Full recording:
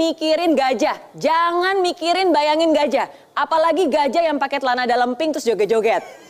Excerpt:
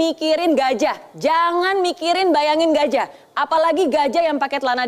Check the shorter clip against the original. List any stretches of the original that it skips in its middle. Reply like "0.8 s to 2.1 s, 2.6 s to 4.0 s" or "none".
none